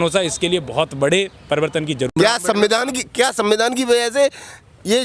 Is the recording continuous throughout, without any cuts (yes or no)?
no